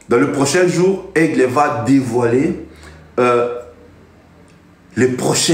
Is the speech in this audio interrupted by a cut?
no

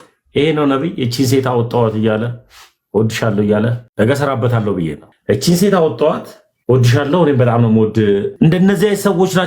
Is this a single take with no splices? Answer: no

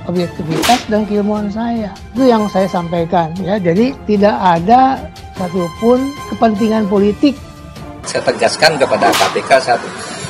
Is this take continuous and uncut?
no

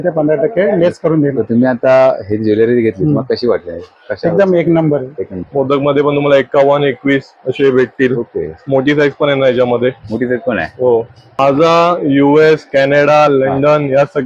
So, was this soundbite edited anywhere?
yes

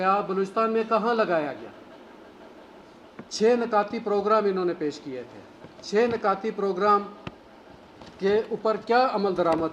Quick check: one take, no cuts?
no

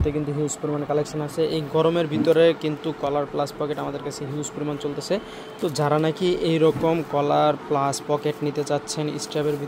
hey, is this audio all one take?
yes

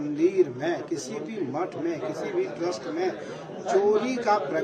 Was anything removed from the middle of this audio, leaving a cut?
no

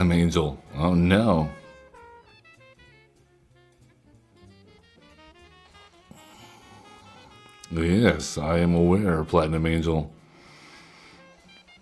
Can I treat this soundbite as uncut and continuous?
no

